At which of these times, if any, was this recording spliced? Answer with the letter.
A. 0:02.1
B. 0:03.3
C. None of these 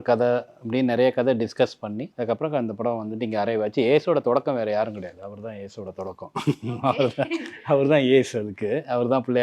A